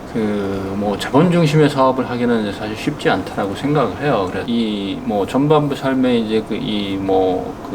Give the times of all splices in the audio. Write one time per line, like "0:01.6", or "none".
0:04.4